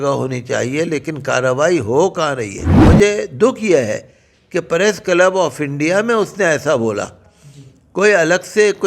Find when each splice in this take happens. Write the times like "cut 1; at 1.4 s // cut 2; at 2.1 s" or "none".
cut 1; at 2.7 s